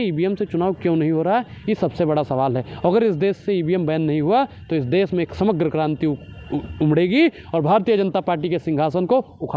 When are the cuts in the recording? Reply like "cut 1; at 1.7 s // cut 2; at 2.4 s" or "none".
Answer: none